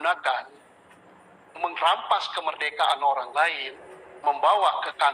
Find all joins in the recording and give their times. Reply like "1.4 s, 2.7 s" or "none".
none